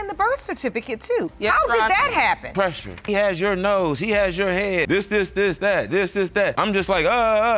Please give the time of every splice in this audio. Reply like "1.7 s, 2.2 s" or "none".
3.0 s, 4.8 s, 6.6 s